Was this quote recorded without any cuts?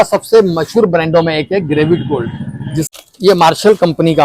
no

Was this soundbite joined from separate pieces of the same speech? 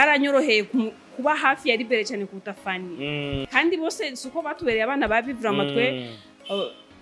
yes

